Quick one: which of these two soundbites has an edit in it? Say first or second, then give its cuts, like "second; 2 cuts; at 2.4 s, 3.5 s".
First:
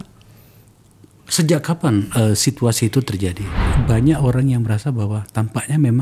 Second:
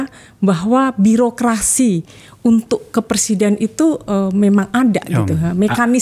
first; 1 cut; at 3.6 s